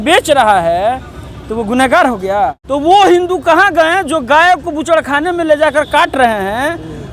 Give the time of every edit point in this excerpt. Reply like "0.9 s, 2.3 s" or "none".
2.6 s